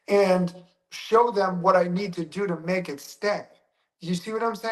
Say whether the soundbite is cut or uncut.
uncut